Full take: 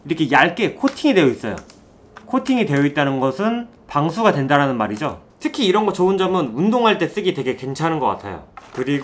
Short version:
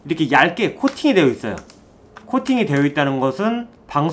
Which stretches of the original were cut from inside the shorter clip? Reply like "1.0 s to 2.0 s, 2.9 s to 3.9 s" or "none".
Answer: none